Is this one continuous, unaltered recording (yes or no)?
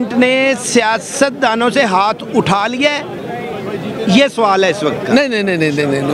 yes